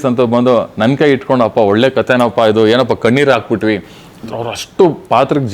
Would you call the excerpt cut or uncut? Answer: uncut